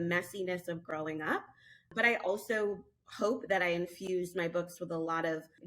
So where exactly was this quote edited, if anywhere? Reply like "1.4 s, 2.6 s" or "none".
1.9 s